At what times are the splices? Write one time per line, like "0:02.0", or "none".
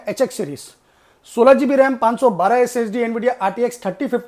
none